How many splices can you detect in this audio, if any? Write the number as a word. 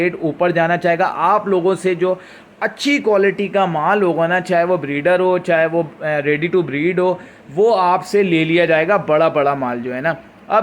zero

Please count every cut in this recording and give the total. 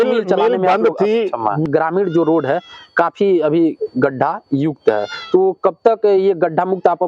one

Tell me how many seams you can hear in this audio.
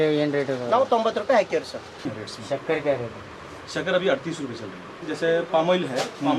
two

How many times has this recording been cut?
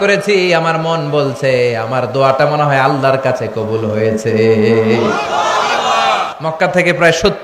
one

